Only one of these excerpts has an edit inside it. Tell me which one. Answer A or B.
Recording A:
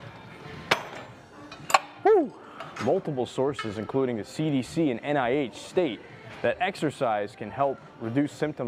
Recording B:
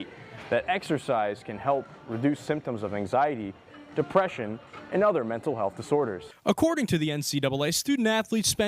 B